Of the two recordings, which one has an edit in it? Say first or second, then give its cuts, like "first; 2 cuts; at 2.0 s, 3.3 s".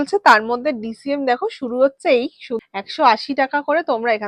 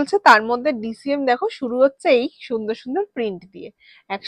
first; 1 cut; at 2.6 s